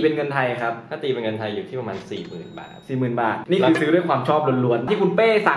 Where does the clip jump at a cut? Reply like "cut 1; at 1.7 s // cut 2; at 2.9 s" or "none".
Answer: cut 1; at 3.4 s // cut 2; at 4.8 s